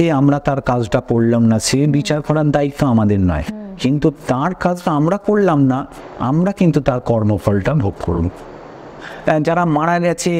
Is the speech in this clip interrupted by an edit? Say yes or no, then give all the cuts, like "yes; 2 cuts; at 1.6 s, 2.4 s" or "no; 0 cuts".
yes; 1 cut; at 9.0 s